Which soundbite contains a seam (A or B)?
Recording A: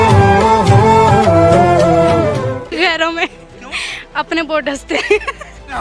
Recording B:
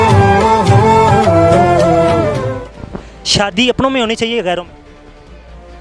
A